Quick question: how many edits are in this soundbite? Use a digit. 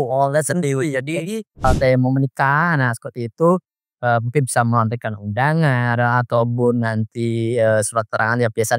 1